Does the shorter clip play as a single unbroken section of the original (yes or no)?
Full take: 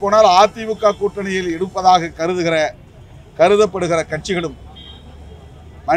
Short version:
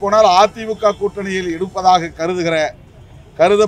yes